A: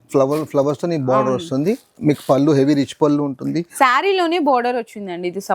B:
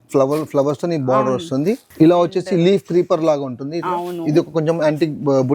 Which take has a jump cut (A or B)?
B